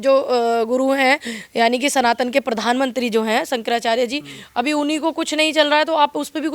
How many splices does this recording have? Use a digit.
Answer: 0